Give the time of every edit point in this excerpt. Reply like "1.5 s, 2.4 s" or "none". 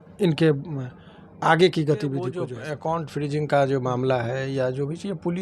2.5 s